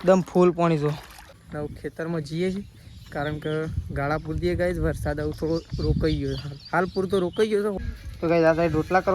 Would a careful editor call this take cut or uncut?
cut